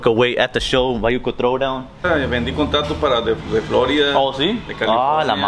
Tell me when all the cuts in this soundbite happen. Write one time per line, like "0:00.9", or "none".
0:02.0